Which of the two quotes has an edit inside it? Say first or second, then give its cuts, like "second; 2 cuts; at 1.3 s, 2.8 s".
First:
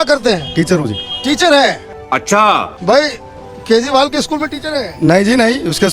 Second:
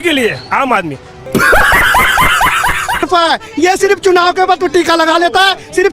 second; 1 cut; at 3.0 s